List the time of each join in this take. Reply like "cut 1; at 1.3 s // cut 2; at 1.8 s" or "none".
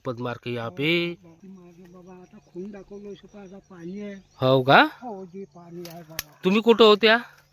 cut 1; at 1.4 s